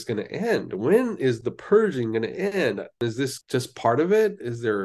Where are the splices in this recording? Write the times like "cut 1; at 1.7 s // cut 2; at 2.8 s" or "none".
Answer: cut 1; at 3.0 s